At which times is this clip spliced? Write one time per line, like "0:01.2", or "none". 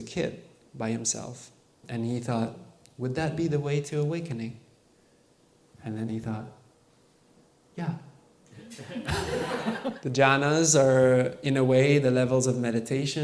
0:01.8
0:09.8